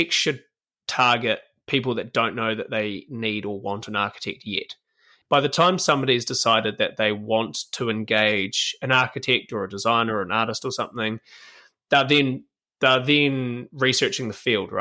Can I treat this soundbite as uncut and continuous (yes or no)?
no